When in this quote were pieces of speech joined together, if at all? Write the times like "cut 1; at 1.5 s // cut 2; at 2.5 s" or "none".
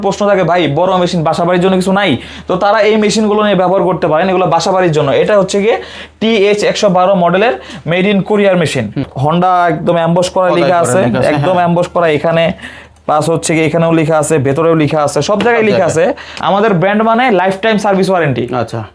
cut 1; at 9.1 s // cut 2; at 16.4 s